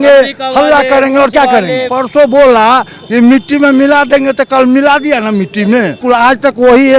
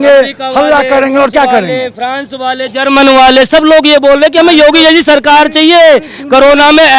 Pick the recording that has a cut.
first; 2 cuts; at 1.9 s, 6.0 s

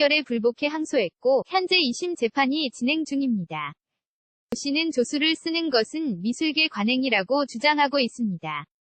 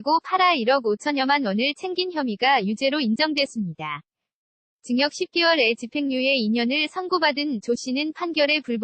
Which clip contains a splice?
first; 1 cut; at 4.5 s

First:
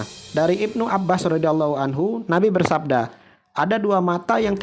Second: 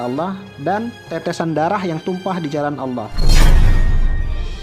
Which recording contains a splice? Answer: second; 1 cut; at 3.2 s

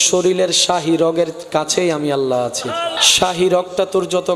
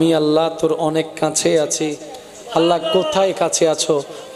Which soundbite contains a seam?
first; 1 cut; at 2.9 s

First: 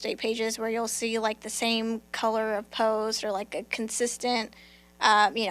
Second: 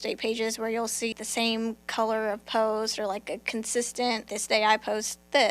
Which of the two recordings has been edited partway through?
second; 2 cuts; at 1.1 s, 4.3 s

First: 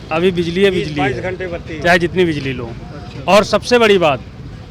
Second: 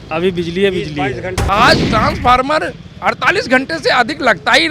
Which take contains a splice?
second; 1 cut; at 1.3 s

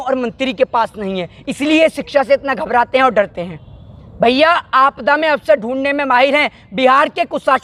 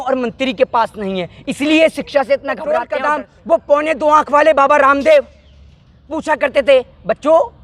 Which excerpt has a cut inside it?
second; 1 cut; at 2.8 s

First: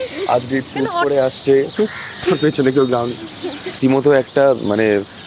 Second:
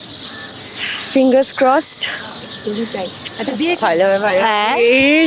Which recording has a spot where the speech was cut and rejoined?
first; 1 cut; at 3.8 s

